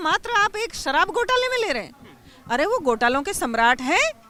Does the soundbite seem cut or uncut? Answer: uncut